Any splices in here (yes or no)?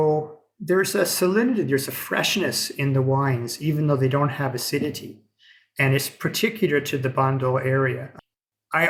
no